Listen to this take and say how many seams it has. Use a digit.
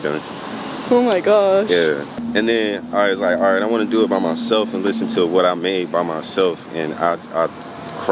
1